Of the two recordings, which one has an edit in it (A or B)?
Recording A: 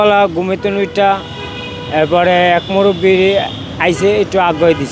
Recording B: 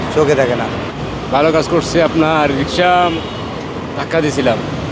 B